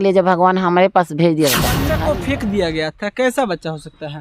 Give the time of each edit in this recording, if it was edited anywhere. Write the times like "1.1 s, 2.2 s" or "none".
1.9 s